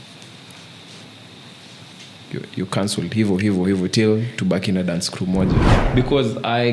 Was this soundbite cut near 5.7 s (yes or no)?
yes